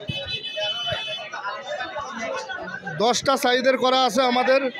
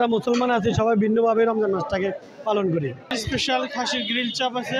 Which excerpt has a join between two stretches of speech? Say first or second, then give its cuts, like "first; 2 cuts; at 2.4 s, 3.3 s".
second; 1 cut; at 3.1 s